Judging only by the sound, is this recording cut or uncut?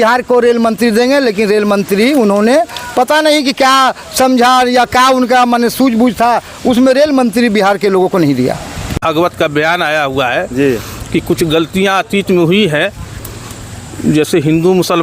cut